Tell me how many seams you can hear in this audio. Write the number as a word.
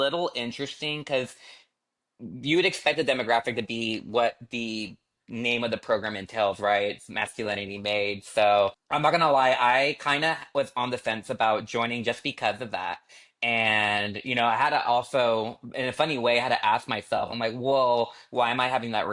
zero